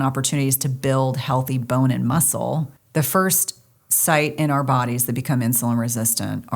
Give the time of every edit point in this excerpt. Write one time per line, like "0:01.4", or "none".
0:02.8